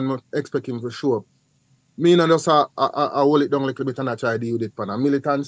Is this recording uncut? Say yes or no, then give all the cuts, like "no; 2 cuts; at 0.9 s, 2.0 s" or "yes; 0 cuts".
yes; 0 cuts